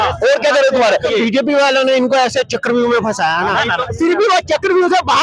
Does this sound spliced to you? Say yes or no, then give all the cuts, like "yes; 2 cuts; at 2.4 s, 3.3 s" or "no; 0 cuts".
yes; 2 cuts; at 1.1 s, 3.8 s